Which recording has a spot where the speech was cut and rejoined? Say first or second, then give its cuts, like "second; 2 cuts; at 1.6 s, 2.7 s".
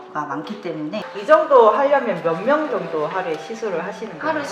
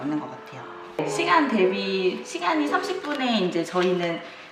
first; 1 cut; at 1.1 s